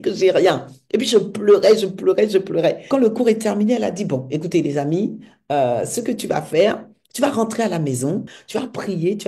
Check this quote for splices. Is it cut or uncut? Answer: cut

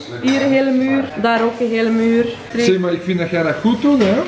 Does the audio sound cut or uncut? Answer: cut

